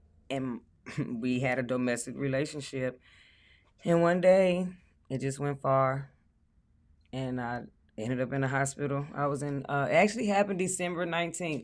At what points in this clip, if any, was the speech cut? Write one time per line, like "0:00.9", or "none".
none